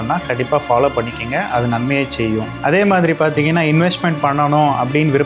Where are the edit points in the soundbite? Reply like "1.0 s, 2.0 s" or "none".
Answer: 2.5 s